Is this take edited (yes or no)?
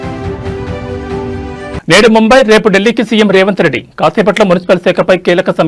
no